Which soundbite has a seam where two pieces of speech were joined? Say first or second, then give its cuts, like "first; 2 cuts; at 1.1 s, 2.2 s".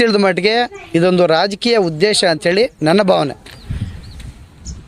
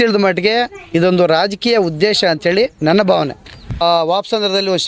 second; 1 cut; at 3.8 s